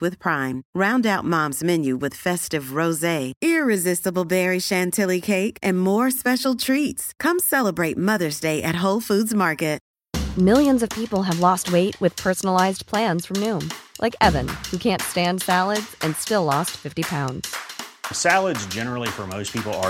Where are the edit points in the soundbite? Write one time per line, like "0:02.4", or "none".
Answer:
0:09.9